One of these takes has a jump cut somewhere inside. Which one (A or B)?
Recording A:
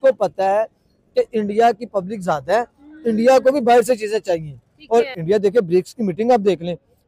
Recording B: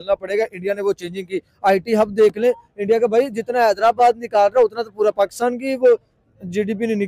A